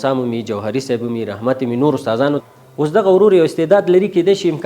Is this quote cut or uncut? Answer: cut